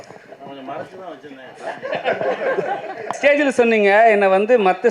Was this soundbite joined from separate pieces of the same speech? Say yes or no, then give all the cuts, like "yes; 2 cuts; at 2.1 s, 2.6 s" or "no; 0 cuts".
yes; 1 cut; at 3.1 s